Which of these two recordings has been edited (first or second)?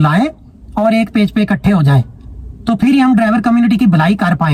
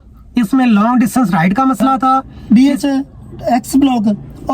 second